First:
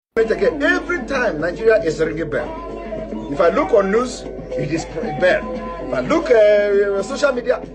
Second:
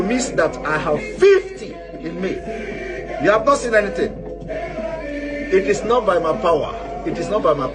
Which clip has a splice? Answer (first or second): first